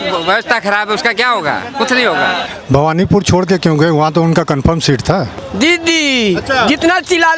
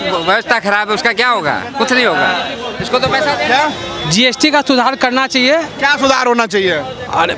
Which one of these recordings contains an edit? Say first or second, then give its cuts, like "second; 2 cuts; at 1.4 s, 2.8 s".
first; 2 cuts; at 2.5 s, 5.5 s